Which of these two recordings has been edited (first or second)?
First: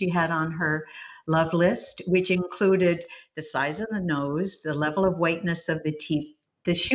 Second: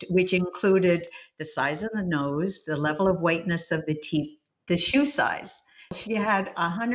second